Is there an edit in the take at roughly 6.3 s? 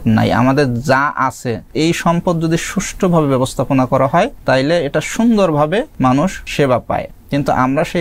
yes; 4 cuts; at 1.7 s, 4.4 s, 6.3 s, 7.2 s

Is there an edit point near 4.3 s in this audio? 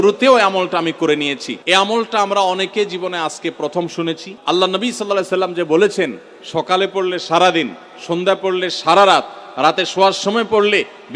yes; 2 cuts; at 1.5 s, 4.3 s

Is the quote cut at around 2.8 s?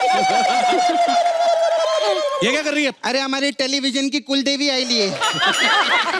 yes; 1 cut; at 2.8 s

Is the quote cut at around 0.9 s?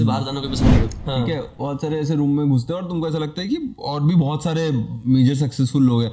yes; 1 cut; at 0.9 s

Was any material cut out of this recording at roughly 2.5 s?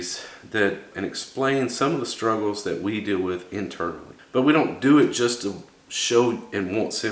no; 2 cuts; at 0.9 s, 4.1 s

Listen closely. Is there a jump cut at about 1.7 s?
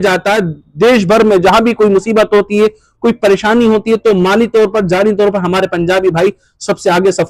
no; 0 cuts

